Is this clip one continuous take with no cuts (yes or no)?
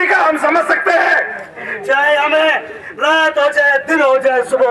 no